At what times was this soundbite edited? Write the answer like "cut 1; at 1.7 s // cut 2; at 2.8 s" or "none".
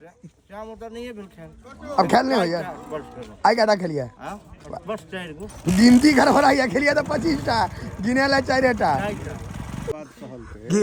none